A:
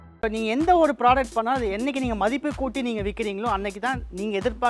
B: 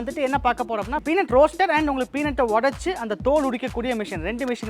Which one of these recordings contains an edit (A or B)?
B